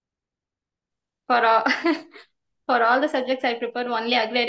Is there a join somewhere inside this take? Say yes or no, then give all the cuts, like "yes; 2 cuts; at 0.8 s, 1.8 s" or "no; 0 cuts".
no; 0 cuts